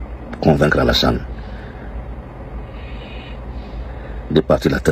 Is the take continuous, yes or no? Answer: yes